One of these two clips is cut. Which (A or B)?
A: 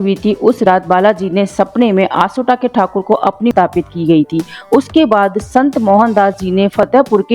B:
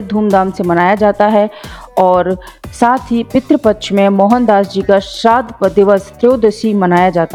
A